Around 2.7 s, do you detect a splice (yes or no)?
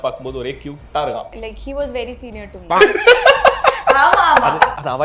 yes